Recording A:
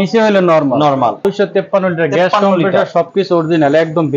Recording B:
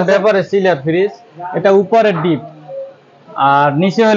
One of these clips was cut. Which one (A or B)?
A